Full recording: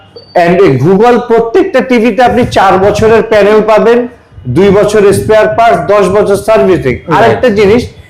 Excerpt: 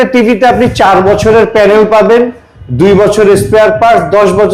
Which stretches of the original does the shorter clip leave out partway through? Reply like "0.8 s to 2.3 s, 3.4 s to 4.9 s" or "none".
none